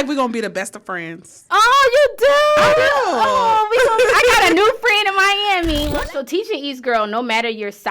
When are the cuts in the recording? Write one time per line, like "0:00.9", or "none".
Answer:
0:05.9